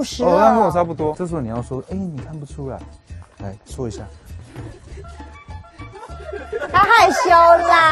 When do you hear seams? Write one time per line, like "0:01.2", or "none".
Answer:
0:01.2